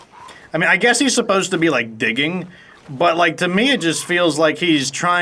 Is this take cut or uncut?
uncut